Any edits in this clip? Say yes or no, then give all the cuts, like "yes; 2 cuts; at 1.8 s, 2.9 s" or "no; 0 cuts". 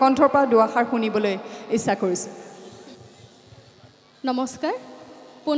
no; 0 cuts